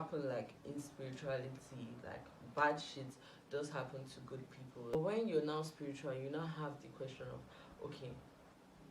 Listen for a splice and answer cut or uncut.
cut